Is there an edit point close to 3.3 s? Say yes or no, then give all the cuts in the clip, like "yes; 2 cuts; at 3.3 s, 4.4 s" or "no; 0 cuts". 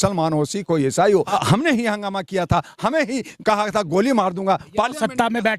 no; 1 cut; at 1.3 s